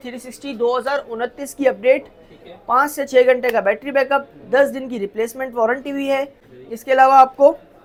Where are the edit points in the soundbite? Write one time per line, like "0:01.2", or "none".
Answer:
none